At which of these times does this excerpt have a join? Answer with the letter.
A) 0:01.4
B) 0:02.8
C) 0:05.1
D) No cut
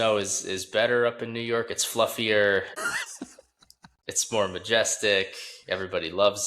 B